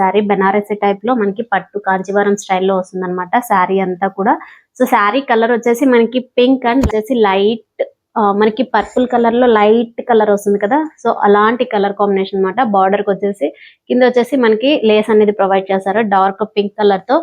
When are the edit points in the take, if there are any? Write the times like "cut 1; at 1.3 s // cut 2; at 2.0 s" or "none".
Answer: cut 1; at 6.9 s

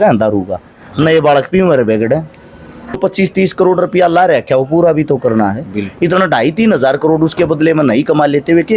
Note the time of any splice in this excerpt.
cut 1; at 2.9 s

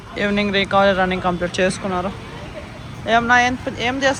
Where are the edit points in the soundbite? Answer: none

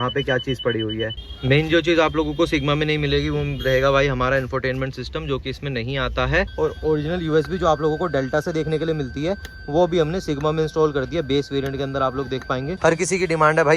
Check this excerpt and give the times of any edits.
cut 1; at 1.3 s // cut 2; at 6.5 s // cut 3; at 12.7 s

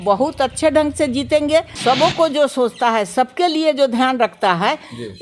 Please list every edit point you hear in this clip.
cut 1; at 1.7 s

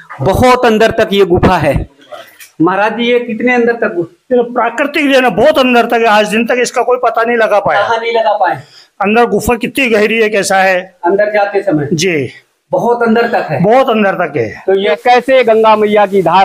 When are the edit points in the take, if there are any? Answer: cut 1; at 15.0 s

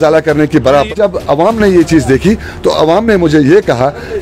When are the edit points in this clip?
cut 1; at 0.9 s

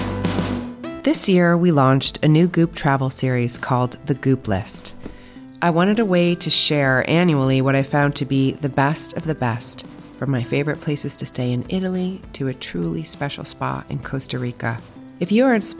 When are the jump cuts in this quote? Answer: cut 1; at 1.0 s

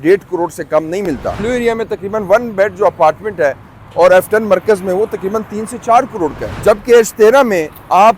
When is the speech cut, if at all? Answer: cut 1; at 1.3 s // cut 2; at 6.5 s

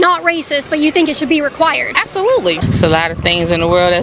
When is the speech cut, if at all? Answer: cut 1; at 2.6 s

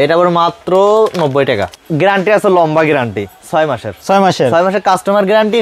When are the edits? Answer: cut 1; at 1.7 s

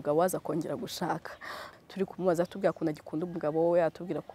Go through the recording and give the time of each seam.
cut 1; at 1.6 s

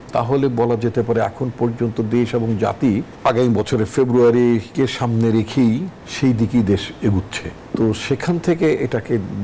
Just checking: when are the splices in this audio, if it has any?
cut 1; at 3.1 s // cut 2; at 6.0 s // cut 3; at 7.5 s

